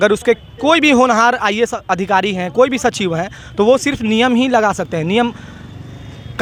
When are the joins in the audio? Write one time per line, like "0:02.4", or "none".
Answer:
none